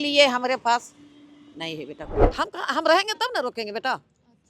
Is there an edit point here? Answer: yes; 1 cut; at 2.2 s

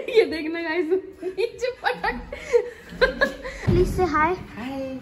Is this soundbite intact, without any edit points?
no; 1 cut; at 3.7 s

